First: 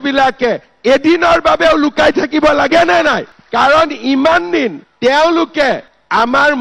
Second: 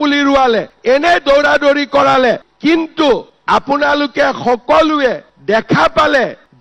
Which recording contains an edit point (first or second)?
second